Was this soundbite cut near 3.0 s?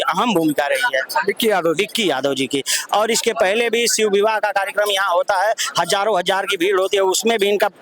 no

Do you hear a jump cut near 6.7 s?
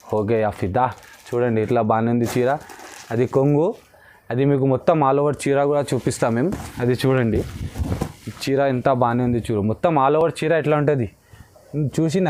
no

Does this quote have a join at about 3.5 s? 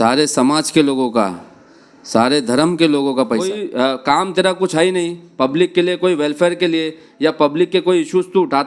yes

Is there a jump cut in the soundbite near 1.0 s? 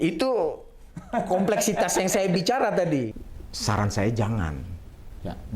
no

